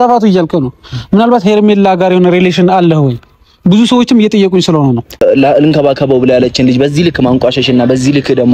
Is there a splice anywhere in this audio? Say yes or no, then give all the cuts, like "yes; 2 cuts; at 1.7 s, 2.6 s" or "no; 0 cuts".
yes; 1 cut; at 5.2 s